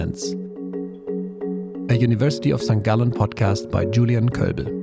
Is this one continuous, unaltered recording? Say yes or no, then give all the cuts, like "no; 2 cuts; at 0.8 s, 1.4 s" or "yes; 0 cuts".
yes; 0 cuts